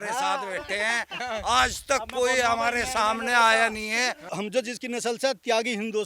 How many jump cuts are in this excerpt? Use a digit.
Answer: 1